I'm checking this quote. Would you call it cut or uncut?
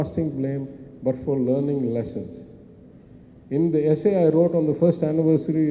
uncut